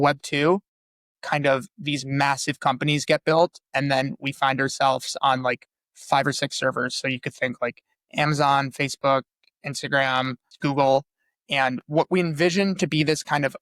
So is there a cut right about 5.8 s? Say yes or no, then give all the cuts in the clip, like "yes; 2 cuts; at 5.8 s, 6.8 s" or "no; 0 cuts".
no; 1 cut; at 10.5 s